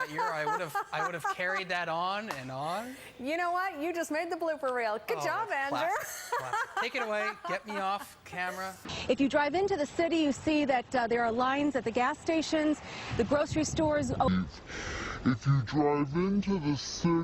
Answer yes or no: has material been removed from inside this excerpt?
no